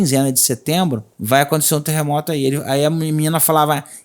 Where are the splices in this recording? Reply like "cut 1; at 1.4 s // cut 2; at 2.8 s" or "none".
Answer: cut 1; at 1.1 s